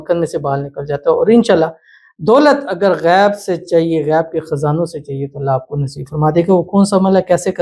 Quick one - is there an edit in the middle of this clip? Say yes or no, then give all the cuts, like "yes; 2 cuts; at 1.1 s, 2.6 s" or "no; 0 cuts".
no; 0 cuts